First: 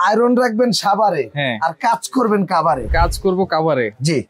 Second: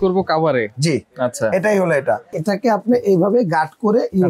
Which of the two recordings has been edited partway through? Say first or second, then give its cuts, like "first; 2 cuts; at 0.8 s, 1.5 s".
second; 1 cut; at 2.3 s